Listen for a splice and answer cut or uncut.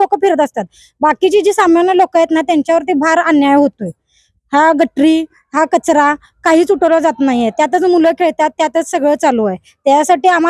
uncut